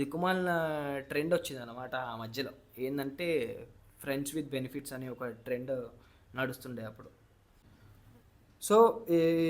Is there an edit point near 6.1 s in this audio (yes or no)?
no